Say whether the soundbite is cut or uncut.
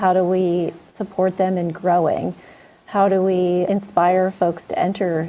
uncut